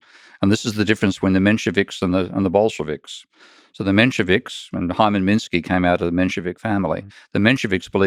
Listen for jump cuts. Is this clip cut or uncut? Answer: uncut